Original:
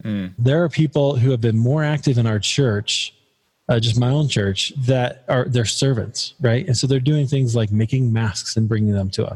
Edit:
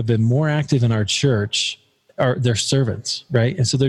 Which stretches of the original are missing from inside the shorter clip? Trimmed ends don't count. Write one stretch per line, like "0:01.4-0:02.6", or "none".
0:03.4-0:05.2